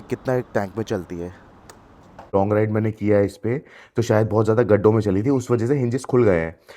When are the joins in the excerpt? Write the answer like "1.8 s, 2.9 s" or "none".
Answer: 2.3 s